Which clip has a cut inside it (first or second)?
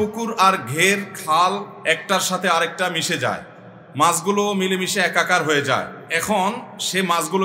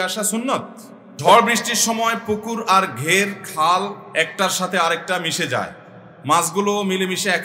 second